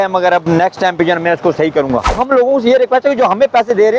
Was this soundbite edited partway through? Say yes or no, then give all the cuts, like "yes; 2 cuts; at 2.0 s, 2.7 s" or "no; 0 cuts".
yes; 1 cut; at 2.2 s